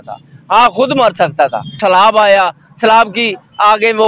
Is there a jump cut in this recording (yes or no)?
yes